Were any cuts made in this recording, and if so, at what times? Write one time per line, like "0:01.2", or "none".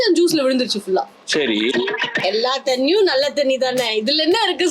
0:01.8